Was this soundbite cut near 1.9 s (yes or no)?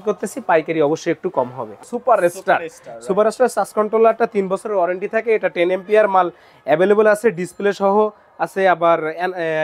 yes